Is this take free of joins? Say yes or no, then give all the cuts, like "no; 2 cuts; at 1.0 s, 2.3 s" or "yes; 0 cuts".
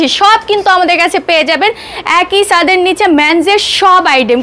yes; 0 cuts